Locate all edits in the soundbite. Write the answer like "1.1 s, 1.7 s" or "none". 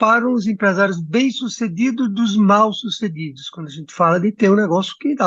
none